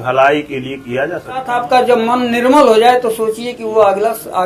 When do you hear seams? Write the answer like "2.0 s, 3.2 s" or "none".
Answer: 1.5 s